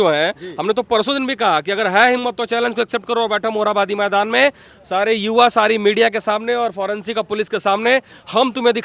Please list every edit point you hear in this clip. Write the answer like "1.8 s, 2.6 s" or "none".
none